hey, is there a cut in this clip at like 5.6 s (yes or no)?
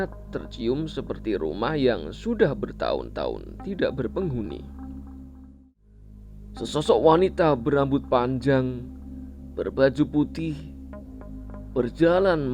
yes